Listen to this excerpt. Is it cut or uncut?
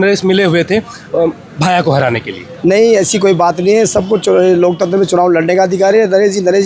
uncut